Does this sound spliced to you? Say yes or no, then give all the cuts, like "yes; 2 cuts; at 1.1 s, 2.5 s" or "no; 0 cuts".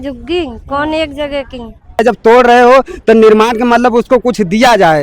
yes; 1 cut; at 2.0 s